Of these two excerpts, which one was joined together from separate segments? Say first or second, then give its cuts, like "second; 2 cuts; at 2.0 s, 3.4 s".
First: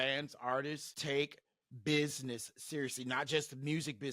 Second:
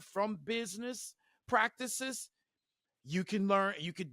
first; 1 cut; at 0.9 s